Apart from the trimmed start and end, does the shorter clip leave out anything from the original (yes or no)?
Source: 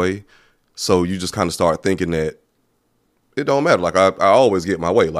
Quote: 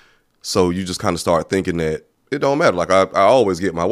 yes